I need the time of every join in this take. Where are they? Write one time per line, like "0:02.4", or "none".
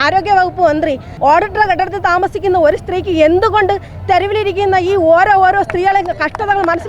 0:01.1